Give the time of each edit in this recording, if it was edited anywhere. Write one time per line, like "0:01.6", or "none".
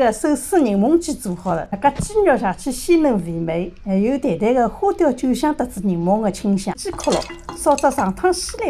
0:01.7
0:06.8